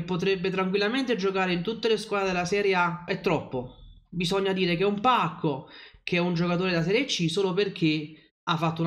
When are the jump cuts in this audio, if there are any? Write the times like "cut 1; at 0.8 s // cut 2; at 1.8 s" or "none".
cut 1; at 3.1 s